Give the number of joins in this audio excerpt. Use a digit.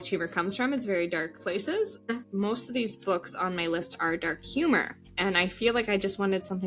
1